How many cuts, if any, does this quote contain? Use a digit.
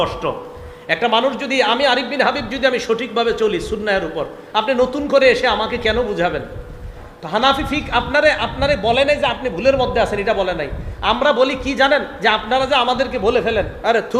1